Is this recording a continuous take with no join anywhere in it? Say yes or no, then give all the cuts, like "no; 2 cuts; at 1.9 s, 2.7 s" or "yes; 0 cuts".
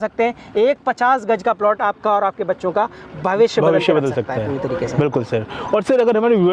yes; 0 cuts